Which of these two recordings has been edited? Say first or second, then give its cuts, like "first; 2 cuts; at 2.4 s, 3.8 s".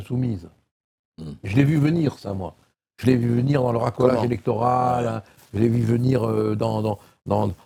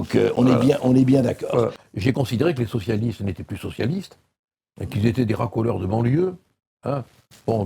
second; 1 cut; at 1.8 s